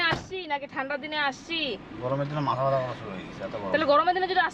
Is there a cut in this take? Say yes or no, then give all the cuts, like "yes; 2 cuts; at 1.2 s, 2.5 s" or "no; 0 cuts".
no; 0 cuts